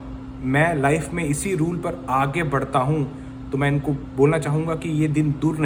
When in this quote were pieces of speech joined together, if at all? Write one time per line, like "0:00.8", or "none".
none